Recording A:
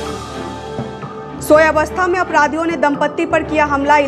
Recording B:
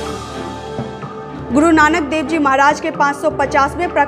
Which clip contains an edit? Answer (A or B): B